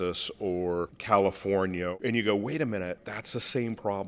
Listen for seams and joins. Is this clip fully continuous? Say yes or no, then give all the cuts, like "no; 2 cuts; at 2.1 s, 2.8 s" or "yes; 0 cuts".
no; 3 cuts; at 1.0 s, 2.0 s, 3.0 s